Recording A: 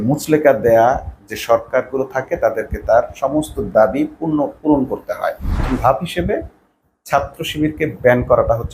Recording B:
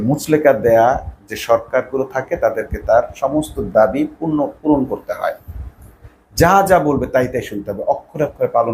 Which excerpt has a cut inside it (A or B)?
A